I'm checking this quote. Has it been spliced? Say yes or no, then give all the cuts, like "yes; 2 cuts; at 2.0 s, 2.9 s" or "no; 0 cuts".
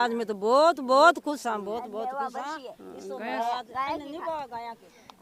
no; 0 cuts